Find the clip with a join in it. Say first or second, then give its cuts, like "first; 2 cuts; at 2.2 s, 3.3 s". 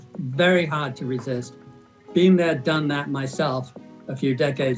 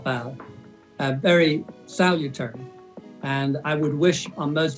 second; 1 cut; at 3.6 s